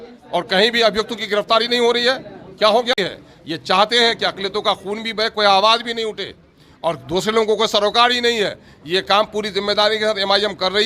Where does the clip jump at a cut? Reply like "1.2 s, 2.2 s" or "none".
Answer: 2.9 s